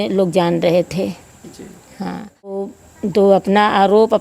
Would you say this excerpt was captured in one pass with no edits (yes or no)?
no